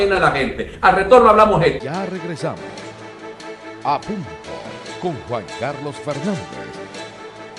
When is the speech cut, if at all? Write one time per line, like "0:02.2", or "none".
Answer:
0:05.2